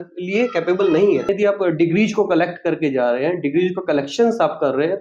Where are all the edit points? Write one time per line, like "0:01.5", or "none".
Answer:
0:01.3